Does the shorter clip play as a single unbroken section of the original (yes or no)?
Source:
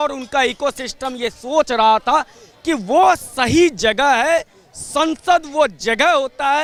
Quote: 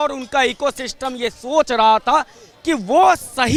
yes